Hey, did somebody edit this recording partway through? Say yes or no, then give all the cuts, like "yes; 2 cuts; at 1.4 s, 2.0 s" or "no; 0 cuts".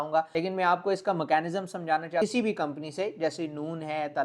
yes; 1 cut; at 2.2 s